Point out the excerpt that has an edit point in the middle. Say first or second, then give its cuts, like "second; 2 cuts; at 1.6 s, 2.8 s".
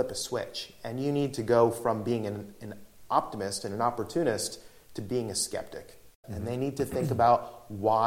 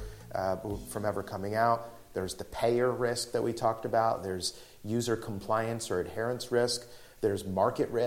first; 1 cut; at 6.3 s